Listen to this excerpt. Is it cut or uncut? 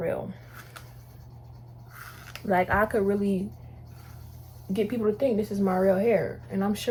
uncut